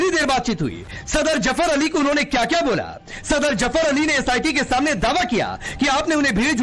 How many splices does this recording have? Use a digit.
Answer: 1